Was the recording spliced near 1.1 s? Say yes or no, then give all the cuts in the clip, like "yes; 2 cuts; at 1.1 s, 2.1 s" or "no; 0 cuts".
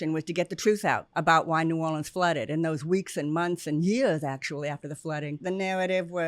yes; 2 cuts; at 1.1 s, 5.4 s